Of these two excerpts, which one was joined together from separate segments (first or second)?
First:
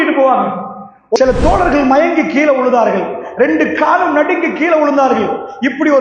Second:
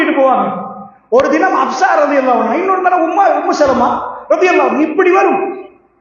first